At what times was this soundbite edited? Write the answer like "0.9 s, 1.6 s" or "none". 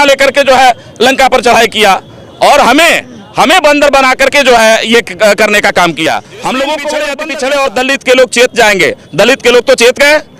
7.3 s